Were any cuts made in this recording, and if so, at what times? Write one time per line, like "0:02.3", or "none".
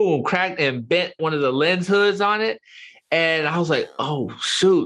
0:01.2